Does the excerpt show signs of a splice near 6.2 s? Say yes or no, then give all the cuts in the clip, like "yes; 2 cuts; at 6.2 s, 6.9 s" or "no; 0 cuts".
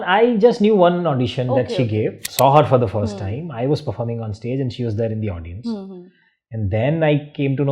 no; 1 cut; at 2.2 s